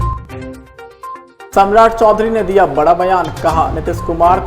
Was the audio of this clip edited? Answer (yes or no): yes